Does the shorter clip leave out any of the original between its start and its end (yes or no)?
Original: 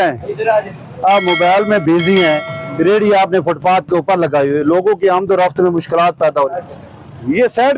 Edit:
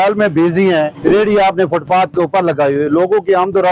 yes